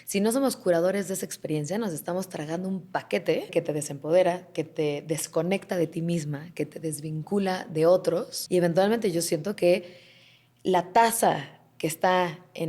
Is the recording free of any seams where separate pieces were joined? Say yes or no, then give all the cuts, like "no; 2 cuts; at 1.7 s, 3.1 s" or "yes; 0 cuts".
no; 2 cuts; at 3.5 s, 8.3 s